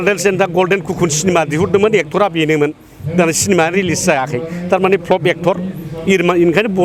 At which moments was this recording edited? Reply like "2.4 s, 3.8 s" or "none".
none